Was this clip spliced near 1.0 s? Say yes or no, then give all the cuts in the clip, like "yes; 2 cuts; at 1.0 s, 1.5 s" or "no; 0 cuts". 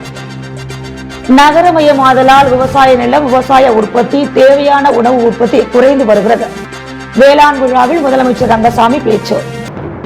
yes; 1 cut; at 1.0 s